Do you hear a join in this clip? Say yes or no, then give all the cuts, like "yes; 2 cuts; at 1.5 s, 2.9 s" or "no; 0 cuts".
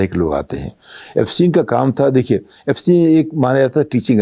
no; 0 cuts